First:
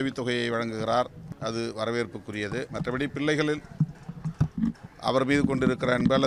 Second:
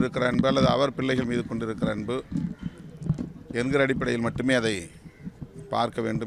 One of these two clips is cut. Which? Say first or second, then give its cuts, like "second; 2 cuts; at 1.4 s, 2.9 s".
first; 2 cuts; at 1.2 s, 2.7 s